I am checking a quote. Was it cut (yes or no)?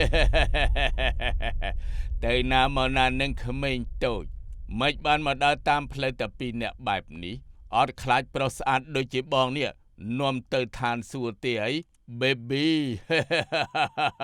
no